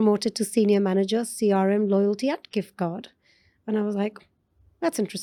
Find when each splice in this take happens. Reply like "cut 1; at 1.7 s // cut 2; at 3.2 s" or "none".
none